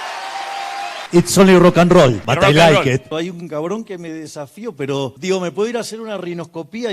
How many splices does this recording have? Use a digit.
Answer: 4